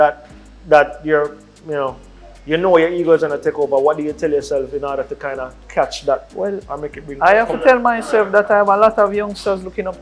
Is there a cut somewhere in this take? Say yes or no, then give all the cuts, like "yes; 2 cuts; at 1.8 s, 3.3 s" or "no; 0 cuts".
no; 0 cuts